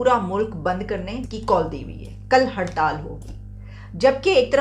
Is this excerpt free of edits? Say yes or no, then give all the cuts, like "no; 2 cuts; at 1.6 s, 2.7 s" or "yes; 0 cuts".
no; 1 cut; at 1.3 s